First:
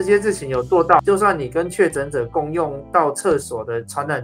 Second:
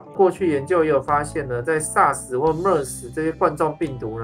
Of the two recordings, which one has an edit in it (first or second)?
first